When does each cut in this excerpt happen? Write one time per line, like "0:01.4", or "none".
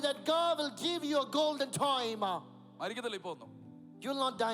none